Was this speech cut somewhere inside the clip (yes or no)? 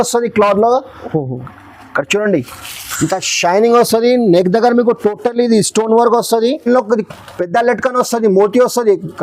yes